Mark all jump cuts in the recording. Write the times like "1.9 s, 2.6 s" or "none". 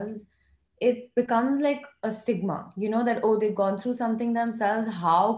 none